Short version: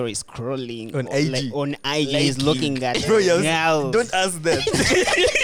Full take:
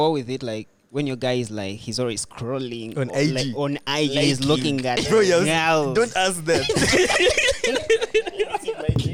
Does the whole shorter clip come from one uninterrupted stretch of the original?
yes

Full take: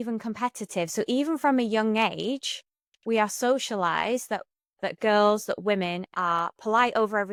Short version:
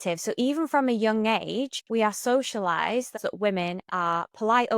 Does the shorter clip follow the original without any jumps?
no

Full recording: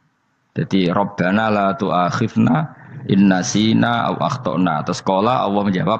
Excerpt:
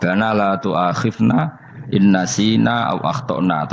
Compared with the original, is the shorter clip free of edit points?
yes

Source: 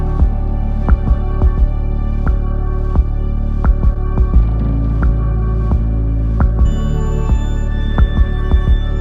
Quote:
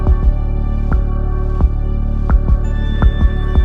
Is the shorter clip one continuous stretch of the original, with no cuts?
no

